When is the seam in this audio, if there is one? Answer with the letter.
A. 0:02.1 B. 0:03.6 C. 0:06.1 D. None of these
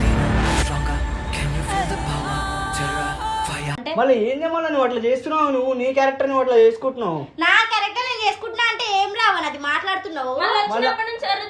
D